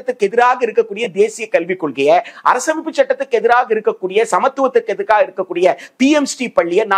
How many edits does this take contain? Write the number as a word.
zero